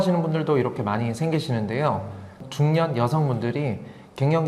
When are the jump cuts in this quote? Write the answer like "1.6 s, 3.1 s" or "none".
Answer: 2.4 s

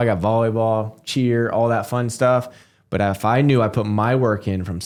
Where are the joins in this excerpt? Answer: none

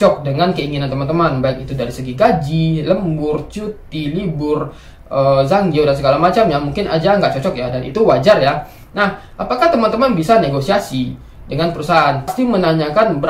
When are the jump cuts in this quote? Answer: 12.3 s

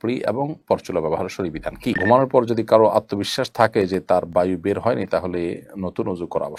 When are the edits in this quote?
2.0 s

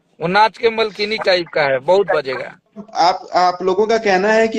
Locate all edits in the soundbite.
2.8 s

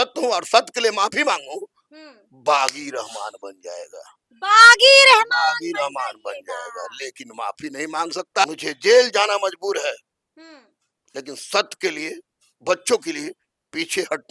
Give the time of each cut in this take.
8.4 s

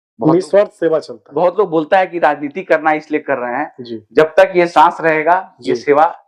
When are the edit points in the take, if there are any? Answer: none

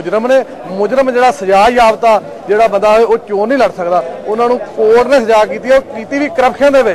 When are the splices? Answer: none

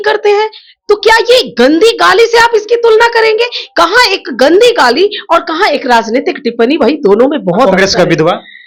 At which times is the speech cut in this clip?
none

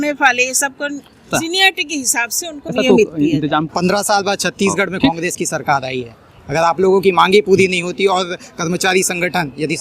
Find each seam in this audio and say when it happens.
1.2 s, 2.7 s, 3.7 s

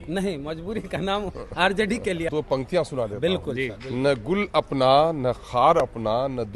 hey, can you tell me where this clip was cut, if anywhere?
2.3 s

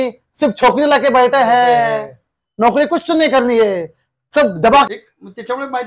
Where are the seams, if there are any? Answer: 4.9 s

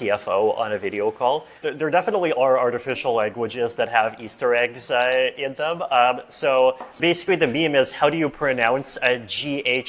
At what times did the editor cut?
1.7 s, 7.0 s

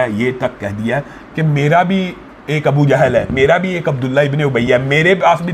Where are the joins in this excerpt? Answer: none

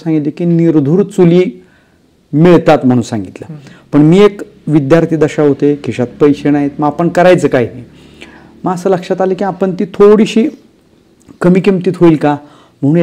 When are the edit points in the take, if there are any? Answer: none

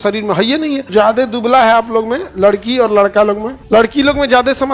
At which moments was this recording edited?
0.9 s, 3.5 s

